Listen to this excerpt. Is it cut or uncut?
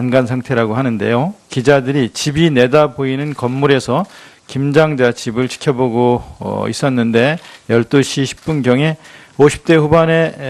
uncut